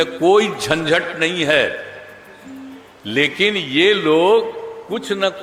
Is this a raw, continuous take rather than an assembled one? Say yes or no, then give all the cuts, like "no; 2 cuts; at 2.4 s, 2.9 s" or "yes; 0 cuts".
yes; 0 cuts